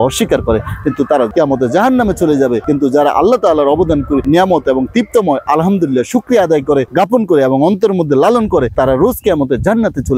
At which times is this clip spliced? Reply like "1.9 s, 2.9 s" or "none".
none